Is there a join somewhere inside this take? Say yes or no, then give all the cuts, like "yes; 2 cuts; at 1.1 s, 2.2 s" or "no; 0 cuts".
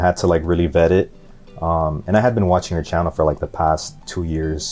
no; 0 cuts